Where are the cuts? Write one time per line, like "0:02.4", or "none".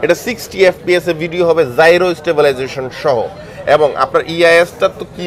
none